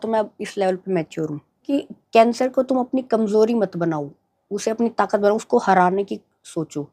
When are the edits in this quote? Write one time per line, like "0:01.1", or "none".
0:01.5